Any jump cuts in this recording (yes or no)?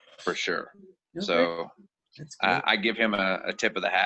no